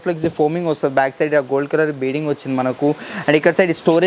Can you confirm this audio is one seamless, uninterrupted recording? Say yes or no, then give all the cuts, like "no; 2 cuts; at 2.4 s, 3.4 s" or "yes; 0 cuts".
yes; 0 cuts